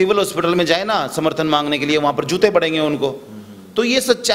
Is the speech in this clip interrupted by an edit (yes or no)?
no